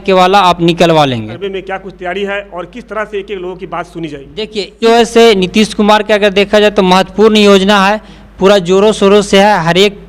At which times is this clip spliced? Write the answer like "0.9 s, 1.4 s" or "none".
1.3 s, 4.8 s